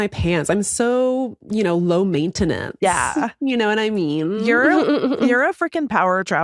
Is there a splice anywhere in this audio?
no; 0 cuts

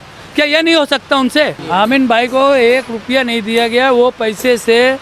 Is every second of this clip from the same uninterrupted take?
no; 1 cut; at 1.6 s

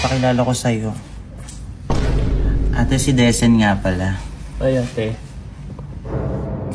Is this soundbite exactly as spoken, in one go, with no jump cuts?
yes; 0 cuts

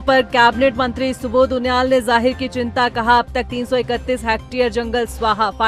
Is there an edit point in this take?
no; 0 cuts

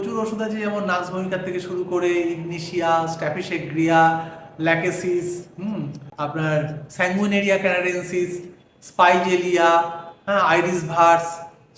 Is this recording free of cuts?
yes; 0 cuts

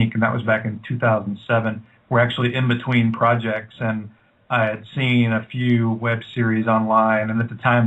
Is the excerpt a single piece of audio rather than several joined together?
yes; 0 cuts

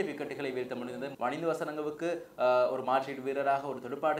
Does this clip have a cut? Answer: yes; 1 cut; at 1.1 s

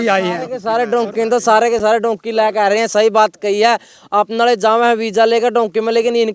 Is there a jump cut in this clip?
no; 0 cuts

